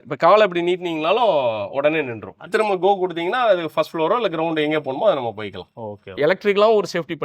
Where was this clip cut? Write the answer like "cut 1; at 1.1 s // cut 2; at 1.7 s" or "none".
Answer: cut 1; at 2.4 s // cut 2; at 6.2 s